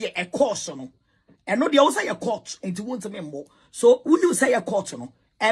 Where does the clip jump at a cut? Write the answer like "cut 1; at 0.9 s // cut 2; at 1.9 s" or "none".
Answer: none